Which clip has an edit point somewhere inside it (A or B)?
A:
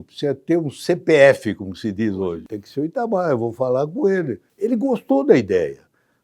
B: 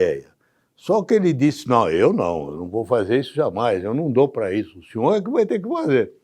A